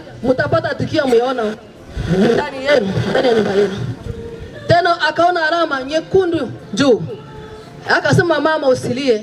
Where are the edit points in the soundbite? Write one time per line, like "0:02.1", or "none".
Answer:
none